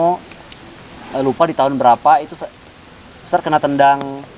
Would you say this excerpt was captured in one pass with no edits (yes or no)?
yes